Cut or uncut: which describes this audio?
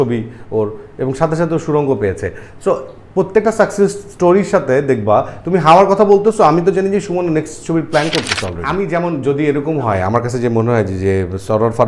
cut